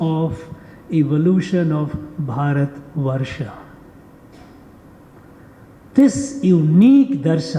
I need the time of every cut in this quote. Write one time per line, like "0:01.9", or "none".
0:04.8

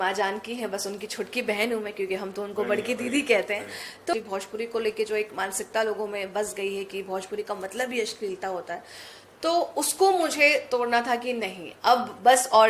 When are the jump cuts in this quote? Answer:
0:04.1

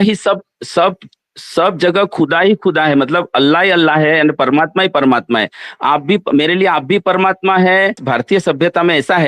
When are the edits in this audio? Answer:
0:08.0

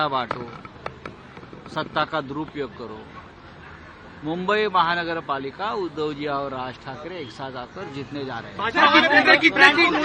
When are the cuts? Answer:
none

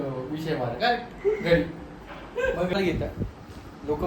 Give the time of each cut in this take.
0:02.7

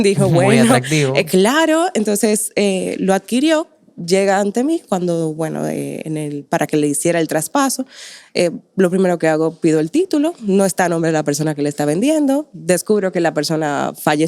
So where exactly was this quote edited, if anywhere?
none

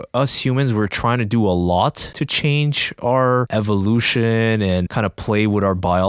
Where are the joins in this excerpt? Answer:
0:02.1
0:03.5
0:04.9

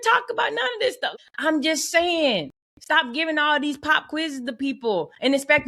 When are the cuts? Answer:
0:01.1

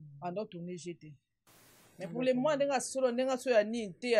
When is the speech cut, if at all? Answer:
none

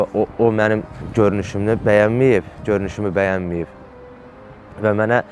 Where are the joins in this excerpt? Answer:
none

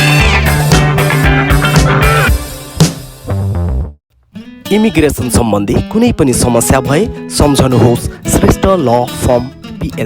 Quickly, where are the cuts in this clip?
0:04.1

